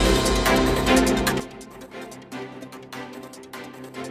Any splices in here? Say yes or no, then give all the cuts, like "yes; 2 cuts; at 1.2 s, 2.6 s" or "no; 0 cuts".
yes; 1 cut; at 1.3 s